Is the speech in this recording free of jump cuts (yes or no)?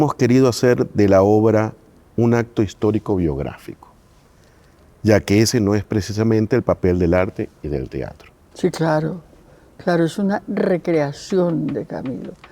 no